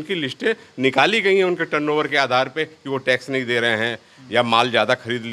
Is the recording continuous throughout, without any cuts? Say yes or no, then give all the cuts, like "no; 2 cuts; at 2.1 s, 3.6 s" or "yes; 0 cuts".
yes; 0 cuts